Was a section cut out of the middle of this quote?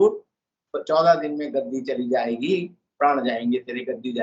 no; 0 cuts

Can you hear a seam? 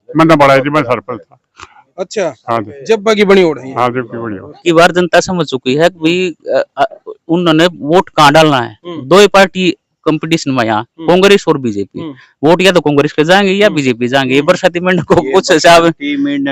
yes; 1 cut; at 4.6 s

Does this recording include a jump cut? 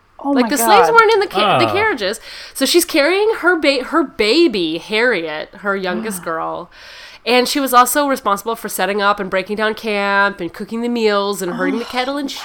no; 0 cuts

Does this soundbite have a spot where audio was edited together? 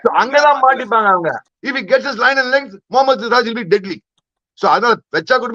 yes; 1 cut; at 1.5 s

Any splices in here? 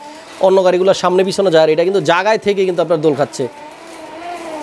no; 0 cuts

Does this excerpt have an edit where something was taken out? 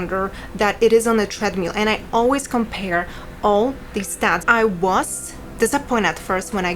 yes; 1 cut; at 4.4 s

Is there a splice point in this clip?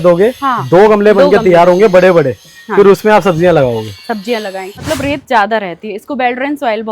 yes; 1 cut; at 4.8 s

